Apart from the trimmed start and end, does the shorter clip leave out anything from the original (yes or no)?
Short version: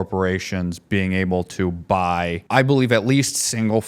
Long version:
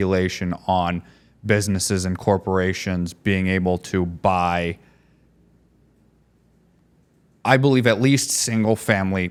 yes